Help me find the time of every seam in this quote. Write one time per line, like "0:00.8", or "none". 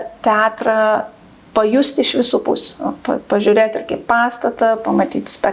none